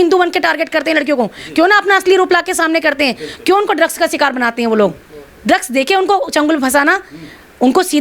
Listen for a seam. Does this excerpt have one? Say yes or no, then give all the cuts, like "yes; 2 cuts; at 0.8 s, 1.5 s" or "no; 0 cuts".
no; 0 cuts